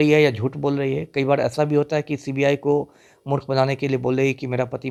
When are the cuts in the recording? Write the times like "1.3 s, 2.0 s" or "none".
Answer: none